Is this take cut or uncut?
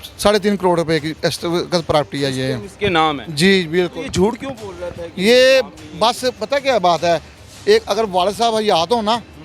uncut